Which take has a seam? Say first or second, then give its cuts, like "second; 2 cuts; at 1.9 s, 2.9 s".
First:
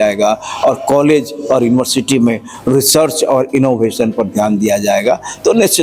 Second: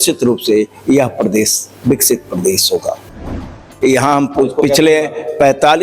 second; 1 cut; at 3.2 s